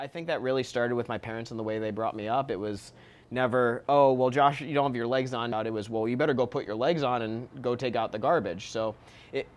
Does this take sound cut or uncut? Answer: cut